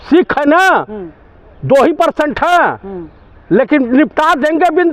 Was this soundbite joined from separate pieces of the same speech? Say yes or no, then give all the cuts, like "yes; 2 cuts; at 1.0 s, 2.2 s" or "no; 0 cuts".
no; 0 cuts